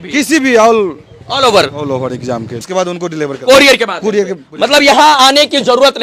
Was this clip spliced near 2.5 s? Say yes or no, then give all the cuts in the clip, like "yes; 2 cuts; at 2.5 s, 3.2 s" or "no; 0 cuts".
yes; 1 cut; at 2.5 s